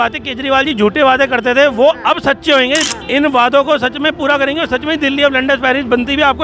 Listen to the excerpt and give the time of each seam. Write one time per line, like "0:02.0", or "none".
0:02.9